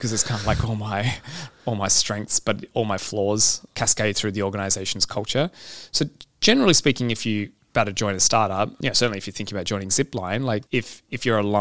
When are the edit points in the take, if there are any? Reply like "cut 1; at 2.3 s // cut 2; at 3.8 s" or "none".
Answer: cut 1; at 3.6 s // cut 2; at 7.6 s // cut 3; at 8.8 s // cut 4; at 10.6 s